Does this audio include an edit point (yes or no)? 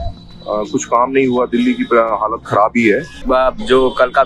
yes